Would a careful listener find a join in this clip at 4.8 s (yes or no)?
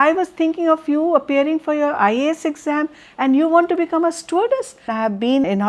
yes